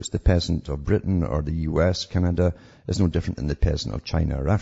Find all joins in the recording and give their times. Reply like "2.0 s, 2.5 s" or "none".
none